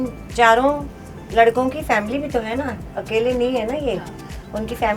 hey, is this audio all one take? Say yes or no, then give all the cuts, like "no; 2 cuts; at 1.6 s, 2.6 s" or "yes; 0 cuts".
yes; 0 cuts